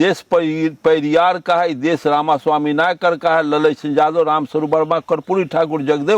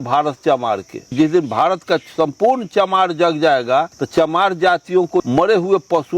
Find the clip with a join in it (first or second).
second